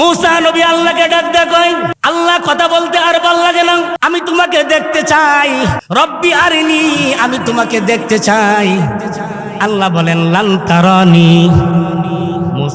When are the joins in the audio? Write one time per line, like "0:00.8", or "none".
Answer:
0:01.9
0:03.9
0:05.8